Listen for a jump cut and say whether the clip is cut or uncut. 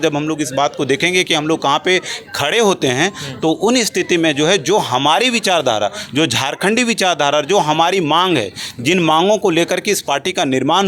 uncut